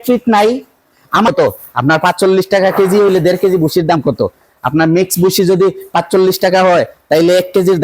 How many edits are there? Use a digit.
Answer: 1